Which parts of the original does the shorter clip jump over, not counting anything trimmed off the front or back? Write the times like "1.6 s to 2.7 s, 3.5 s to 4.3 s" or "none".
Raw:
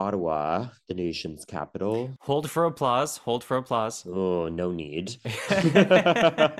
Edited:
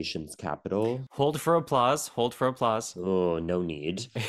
none